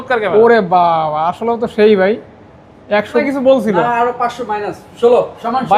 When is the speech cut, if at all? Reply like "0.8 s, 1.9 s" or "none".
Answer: 3.2 s